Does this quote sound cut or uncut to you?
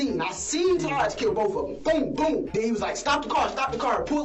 cut